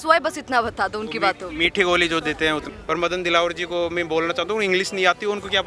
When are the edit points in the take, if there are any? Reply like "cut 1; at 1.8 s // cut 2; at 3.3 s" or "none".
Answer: cut 1; at 2.7 s